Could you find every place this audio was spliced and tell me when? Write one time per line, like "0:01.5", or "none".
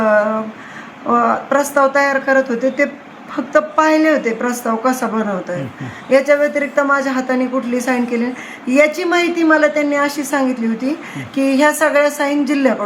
none